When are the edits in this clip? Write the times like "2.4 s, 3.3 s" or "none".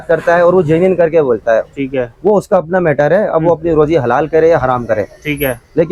none